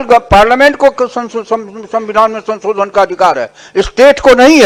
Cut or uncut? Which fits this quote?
uncut